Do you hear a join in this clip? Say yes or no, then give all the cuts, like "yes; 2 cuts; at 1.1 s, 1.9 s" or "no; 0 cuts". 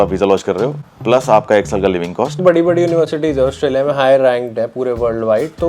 yes; 1 cut; at 2.4 s